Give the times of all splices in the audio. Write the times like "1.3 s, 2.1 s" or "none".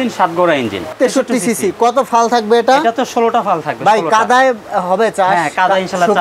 0.9 s